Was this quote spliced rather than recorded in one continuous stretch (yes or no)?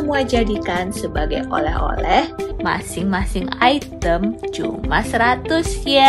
yes